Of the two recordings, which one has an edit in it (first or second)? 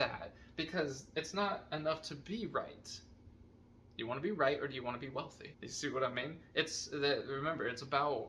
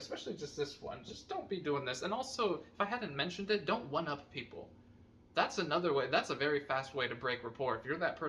first